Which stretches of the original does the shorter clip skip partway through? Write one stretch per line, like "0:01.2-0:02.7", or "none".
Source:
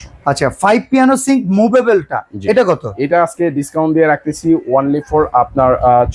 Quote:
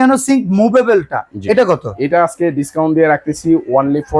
none